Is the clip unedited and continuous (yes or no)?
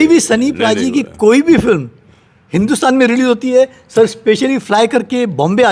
yes